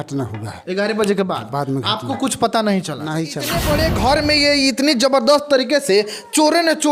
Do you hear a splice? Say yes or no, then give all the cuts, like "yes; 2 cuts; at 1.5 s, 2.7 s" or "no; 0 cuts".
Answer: yes; 1 cut; at 3.6 s